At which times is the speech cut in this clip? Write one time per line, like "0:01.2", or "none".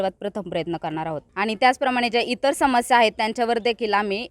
0:01.2